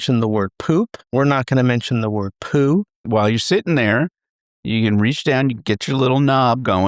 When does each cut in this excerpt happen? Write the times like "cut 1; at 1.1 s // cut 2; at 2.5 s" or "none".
cut 1; at 3.1 s